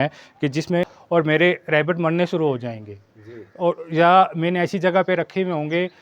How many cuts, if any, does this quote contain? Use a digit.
1